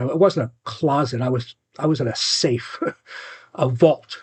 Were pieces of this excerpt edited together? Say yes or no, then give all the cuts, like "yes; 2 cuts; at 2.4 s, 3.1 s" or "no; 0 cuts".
no; 0 cuts